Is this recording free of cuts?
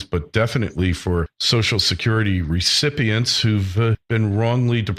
yes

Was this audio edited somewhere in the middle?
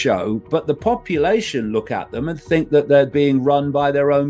no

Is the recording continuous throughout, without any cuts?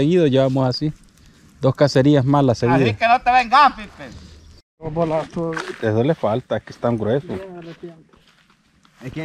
no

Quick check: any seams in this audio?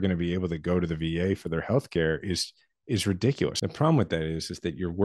yes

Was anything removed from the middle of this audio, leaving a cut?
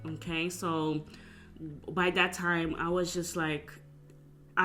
no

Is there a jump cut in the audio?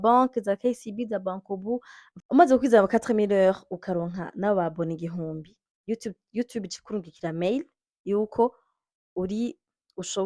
yes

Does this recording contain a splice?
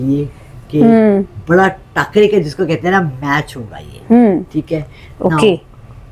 no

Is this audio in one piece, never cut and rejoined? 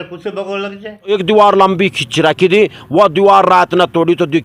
no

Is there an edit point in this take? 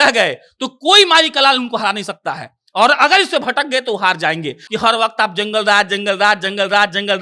yes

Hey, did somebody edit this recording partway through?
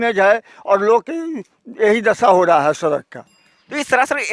no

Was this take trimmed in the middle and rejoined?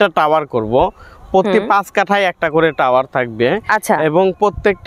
no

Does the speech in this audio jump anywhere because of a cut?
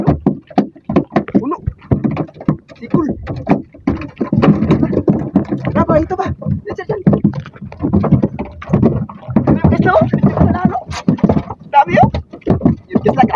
no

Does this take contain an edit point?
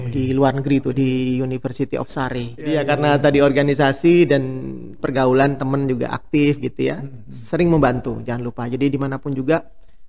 yes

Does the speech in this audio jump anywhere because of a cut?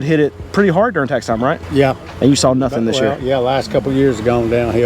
yes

